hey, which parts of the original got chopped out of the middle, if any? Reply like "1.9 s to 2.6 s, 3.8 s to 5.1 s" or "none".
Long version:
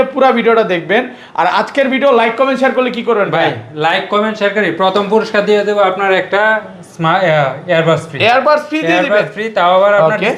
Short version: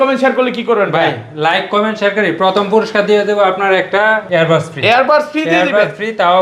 6.6 s to 7.6 s